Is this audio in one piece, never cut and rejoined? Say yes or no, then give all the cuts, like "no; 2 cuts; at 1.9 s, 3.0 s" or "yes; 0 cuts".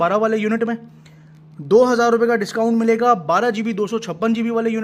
yes; 0 cuts